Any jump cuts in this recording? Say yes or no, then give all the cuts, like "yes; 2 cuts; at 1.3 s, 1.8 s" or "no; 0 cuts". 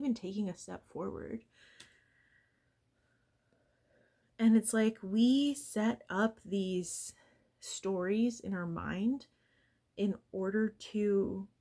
no; 0 cuts